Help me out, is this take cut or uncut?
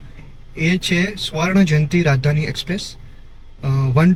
uncut